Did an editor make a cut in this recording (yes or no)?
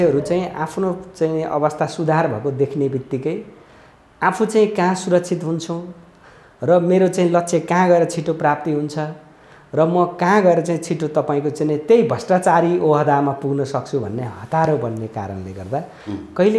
no